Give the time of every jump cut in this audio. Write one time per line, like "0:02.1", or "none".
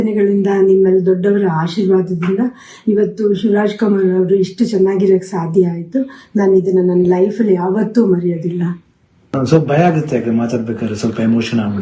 0:09.2